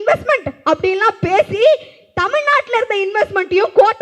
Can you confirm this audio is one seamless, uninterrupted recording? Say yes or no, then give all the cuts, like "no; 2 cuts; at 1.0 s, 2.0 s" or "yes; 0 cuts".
yes; 0 cuts